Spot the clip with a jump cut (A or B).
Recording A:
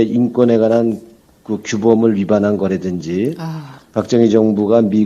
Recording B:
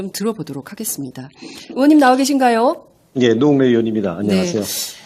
A